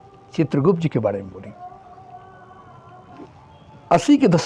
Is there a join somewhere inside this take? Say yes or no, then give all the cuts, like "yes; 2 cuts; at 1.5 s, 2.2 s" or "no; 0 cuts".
yes; 1 cut; at 3.2 s